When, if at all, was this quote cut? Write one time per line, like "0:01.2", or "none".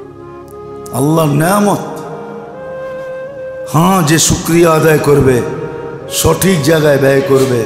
0:00.9